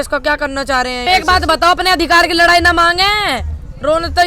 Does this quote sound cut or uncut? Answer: cut